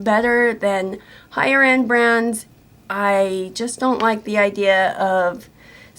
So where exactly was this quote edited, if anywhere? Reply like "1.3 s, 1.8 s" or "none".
2.5 s